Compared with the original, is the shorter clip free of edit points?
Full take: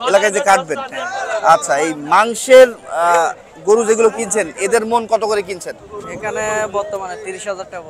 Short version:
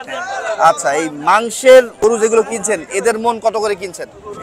no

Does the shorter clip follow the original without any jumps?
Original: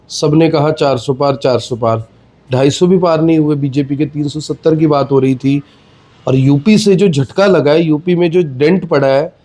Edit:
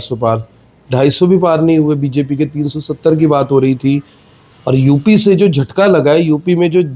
yes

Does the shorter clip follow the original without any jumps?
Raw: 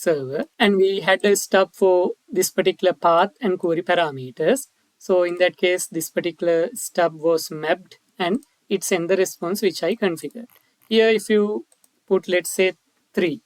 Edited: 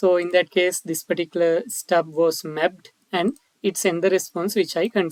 yes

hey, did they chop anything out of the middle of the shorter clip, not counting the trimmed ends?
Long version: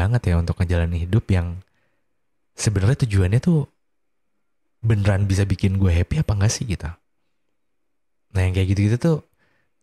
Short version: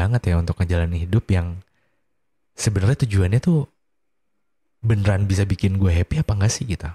no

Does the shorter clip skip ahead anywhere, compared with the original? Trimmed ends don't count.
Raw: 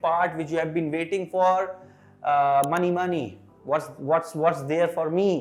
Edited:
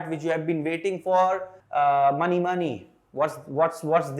yes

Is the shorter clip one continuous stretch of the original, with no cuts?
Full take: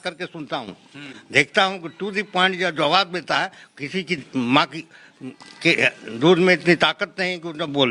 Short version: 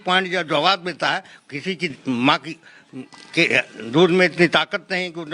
yes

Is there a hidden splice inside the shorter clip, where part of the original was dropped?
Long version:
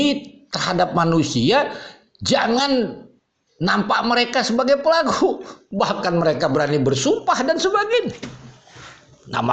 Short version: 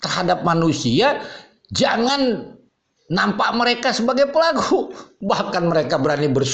no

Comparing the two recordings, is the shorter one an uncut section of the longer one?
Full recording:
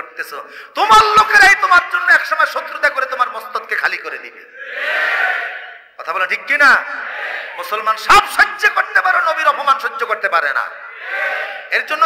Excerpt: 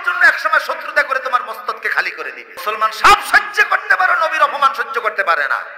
no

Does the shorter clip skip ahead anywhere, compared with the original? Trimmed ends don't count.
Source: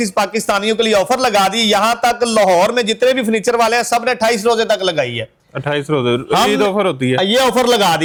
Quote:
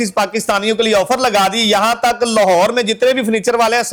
no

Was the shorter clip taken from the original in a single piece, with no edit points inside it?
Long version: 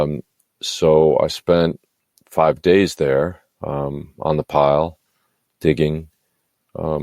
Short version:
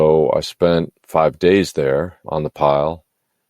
no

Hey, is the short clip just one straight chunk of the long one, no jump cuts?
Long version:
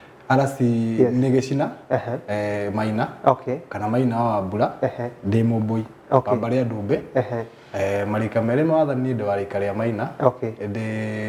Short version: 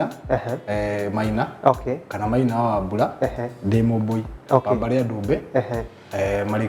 yes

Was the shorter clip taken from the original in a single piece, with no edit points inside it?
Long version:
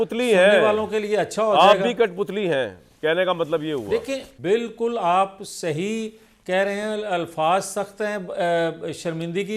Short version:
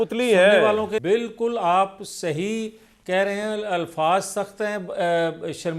no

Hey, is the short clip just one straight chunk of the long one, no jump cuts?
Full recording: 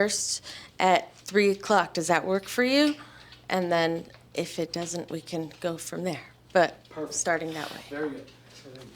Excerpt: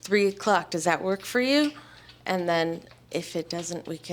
yes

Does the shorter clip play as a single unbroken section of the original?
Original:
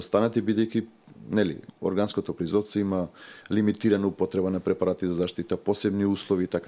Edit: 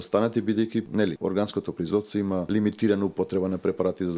no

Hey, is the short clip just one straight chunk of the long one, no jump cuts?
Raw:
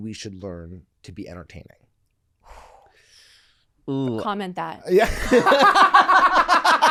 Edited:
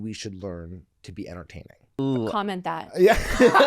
no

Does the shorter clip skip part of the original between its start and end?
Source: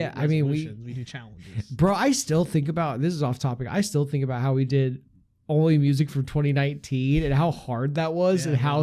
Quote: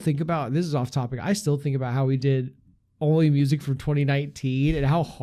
no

